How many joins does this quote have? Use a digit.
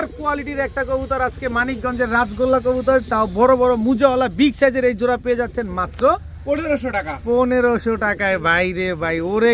0